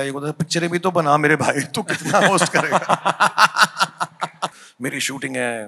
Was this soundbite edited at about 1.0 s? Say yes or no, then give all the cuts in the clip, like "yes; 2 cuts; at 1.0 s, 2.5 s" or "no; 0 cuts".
no; 1 cut; at 4.6 s